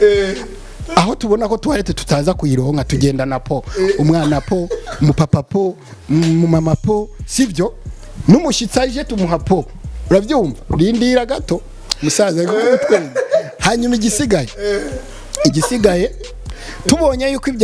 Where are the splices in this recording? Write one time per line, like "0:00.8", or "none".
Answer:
none